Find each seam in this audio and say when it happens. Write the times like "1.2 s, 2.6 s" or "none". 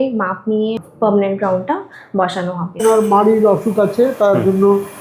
0.8 s, 2.8 s